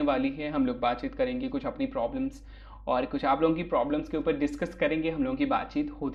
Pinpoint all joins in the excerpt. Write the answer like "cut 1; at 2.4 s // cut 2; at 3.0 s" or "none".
none